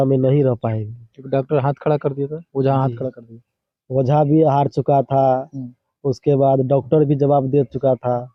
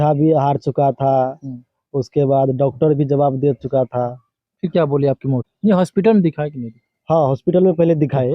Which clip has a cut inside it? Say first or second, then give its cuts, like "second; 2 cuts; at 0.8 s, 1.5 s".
second; 1 cut; at 5.5 s